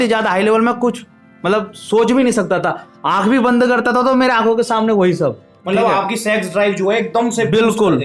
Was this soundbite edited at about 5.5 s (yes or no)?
yes